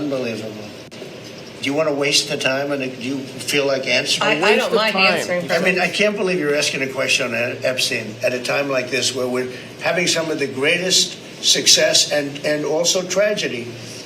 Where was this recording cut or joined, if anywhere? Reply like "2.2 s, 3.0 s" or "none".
2.9 s